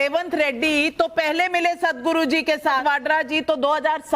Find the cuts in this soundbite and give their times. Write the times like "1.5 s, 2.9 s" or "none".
2.8 s